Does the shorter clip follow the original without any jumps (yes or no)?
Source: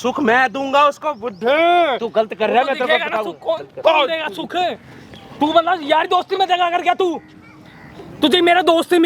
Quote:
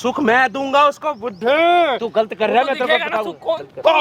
yes